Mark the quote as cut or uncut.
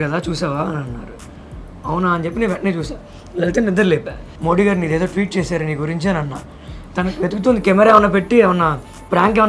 cut